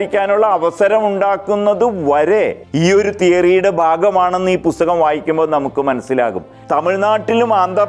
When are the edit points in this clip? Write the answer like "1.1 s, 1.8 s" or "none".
2.6 s, 6.5 s